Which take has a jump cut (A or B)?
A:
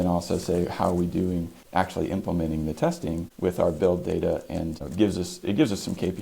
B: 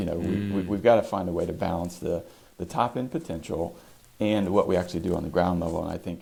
A